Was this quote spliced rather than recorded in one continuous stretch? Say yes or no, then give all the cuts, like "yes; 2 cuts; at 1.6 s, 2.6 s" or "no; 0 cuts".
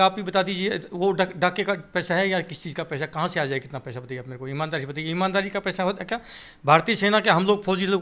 no; 0 cuts